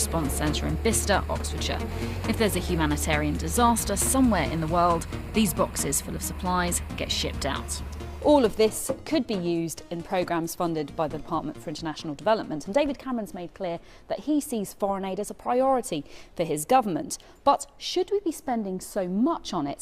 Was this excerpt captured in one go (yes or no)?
no